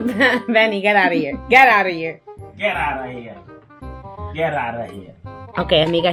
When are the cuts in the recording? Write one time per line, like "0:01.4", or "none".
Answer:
none

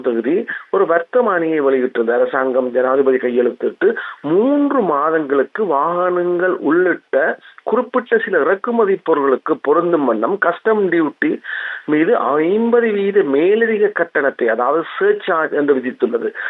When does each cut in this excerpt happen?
none

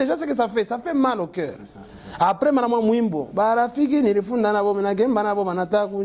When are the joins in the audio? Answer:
none

